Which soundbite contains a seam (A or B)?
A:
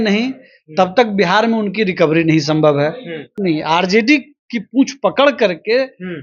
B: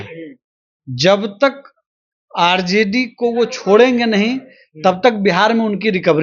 A